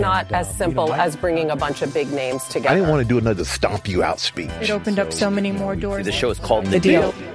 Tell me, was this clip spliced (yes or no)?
no